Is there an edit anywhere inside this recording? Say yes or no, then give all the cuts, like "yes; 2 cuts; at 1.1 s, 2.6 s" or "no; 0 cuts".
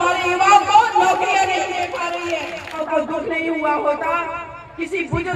yes; 1 cut; at 2.8 s